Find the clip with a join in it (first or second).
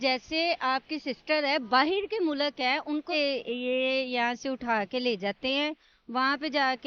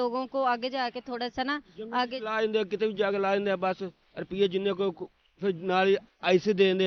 first